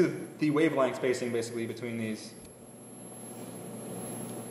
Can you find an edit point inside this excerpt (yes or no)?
yes